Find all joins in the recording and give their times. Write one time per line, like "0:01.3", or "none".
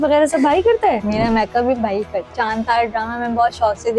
0:01.0
0:02.4